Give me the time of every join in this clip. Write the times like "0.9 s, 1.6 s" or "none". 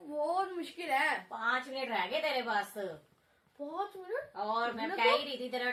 none